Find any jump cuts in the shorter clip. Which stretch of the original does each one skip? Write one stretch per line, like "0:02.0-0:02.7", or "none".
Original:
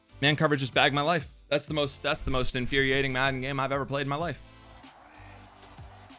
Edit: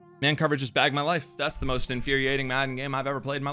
0:01.3-0:02.0